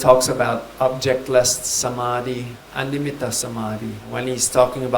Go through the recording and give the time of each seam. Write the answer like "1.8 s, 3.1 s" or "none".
2.6 s, 4.0 s